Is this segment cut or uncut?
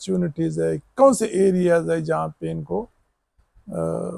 uncut